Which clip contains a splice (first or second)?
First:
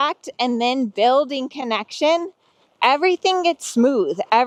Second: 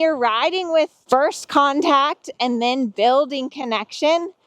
second